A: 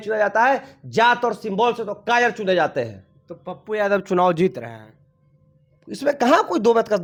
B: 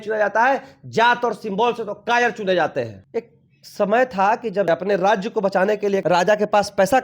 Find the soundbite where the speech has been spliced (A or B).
B